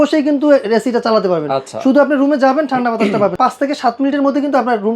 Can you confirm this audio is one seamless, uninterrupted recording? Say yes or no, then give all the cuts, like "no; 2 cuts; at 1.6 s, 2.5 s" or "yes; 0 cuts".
no; 1 cut; at 3.3 s